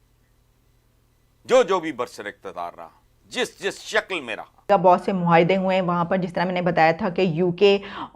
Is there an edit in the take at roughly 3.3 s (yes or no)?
no